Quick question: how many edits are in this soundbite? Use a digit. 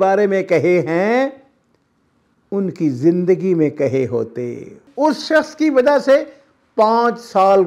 1